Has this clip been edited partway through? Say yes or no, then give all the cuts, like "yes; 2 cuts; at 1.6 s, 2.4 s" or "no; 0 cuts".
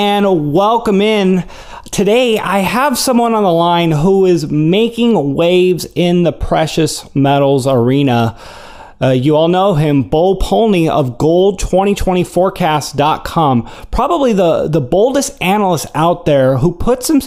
no; 0 cuts